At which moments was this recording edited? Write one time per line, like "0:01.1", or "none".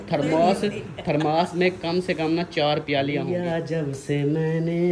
0:03.2

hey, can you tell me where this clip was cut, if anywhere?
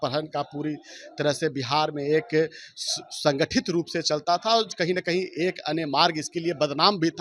none

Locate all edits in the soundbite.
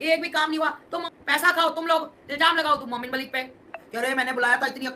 0:01.0
0:03.8

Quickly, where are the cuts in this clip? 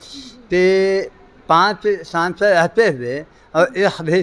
none

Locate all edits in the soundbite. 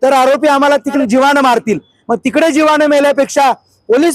0:01.0

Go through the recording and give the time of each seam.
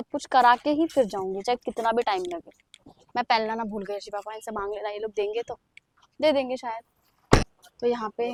none

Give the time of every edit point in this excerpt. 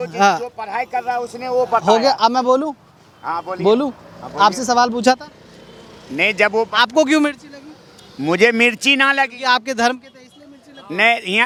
none

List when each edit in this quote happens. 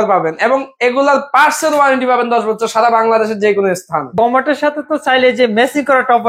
0:04.1

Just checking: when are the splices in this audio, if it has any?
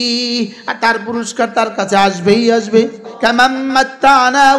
0:03.0

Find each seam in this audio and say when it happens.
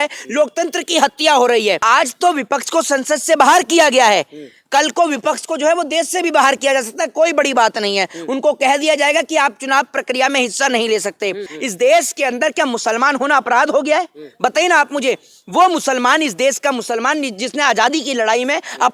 0:01.8
0:11.5

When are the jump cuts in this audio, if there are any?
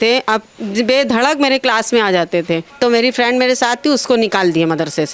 0:02.7

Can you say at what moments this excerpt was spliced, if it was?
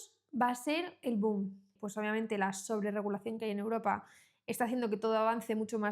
0:01.7

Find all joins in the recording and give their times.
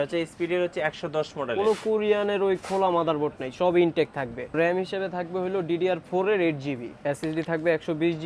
0:04.5
0:06.9

